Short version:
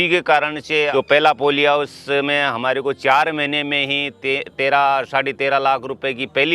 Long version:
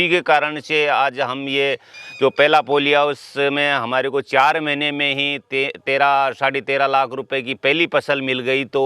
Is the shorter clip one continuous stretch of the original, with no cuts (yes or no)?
no